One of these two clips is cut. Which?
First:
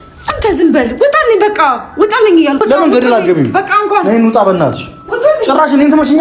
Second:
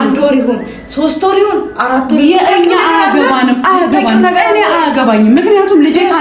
first; 1 cut; at 2.6 s

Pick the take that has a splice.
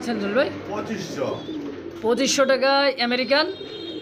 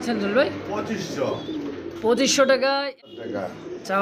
second; 1 cut; at 3.1 s

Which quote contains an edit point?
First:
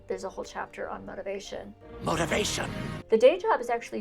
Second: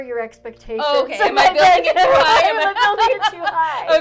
first; 1 cut; at 3.0 s

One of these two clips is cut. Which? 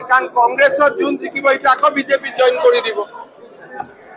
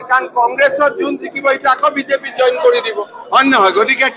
second; 1 cut; at 3.2 s

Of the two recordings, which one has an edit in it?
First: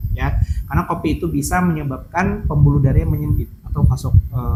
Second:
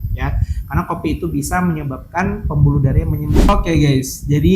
second; 1 cut; at 3.5 s

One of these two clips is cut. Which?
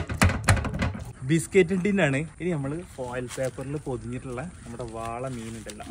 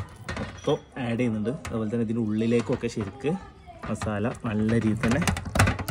first; 2 cuts; at 1.0 s, 2.3 s

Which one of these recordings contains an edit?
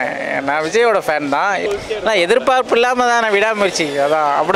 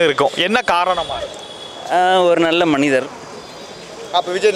first; 1 cut; at 1.6 s

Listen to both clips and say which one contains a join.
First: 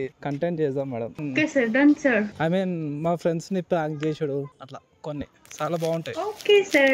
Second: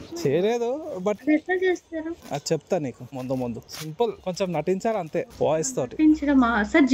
first; 1 cut; at 1.2 s

